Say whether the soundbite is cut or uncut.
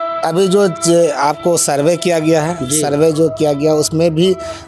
uncut